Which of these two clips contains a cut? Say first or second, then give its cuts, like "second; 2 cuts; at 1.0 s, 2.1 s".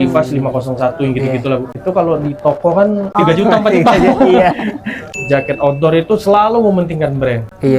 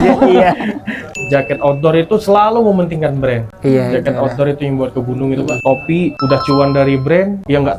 second; 1 cut; at 6.2 s